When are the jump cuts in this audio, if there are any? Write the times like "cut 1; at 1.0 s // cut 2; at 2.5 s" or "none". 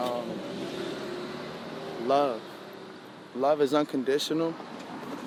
none